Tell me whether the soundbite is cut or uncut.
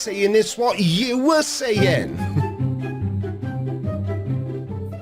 cut